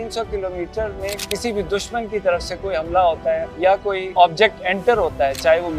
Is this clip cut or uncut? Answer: cut